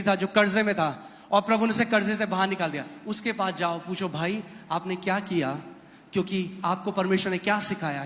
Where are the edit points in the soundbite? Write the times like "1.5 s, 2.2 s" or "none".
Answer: none